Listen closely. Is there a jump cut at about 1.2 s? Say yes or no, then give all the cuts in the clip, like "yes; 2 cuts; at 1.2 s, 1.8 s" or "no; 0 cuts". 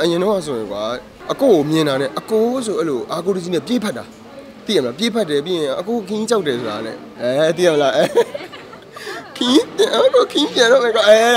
yes; 1 cut; at 1.2 s